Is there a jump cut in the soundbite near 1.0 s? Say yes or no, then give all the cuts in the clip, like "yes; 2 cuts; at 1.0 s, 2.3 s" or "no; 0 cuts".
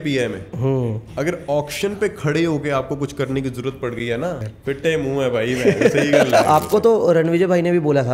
no; 2 cuts; at 4.5 s, 6.5 s